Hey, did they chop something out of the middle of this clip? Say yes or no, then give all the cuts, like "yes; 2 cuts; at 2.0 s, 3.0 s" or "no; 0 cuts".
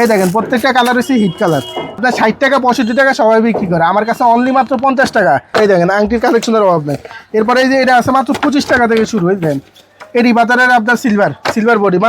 yes; 2 cuts; at 2.0 s, 5.5 s